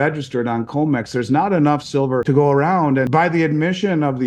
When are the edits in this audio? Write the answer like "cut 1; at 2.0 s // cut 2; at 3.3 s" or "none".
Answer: cut 1; at 2.2 s // cut 2; at 3.1 s